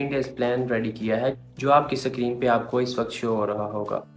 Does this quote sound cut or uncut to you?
uncut